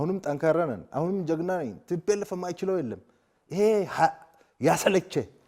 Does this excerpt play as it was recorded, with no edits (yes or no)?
yes